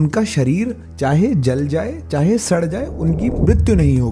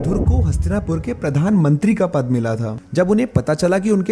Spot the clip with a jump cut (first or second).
second